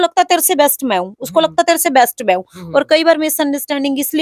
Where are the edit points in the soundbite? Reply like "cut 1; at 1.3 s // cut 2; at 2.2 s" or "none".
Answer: none

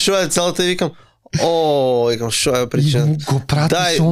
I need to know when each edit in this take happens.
none

